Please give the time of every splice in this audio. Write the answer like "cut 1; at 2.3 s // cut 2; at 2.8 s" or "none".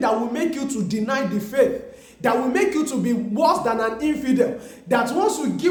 none